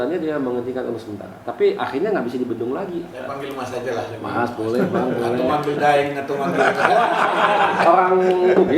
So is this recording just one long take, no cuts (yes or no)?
no